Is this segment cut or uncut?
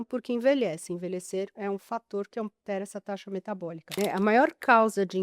cut